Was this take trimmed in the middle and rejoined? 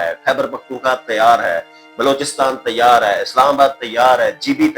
no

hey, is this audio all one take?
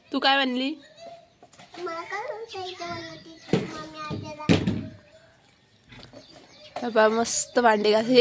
yes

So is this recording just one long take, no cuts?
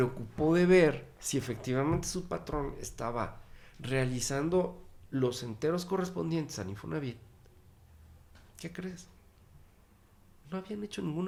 yes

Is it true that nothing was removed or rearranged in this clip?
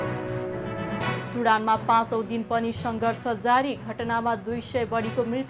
no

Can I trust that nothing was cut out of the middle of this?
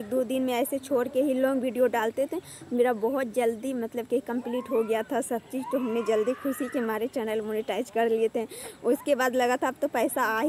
yes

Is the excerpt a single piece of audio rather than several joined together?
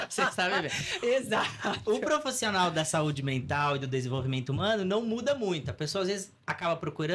yes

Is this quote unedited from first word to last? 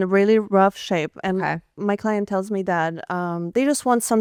yes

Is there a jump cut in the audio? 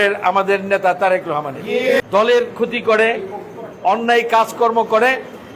yes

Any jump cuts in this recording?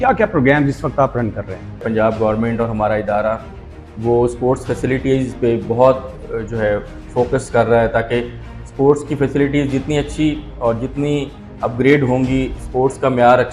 yes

